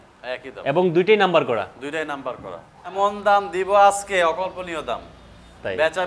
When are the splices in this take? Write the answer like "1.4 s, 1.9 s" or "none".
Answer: 2.9 s